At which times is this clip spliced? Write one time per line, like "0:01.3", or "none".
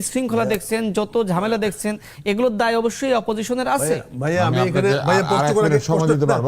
none